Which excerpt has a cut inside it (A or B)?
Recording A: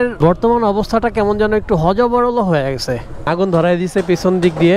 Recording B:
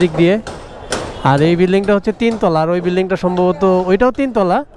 A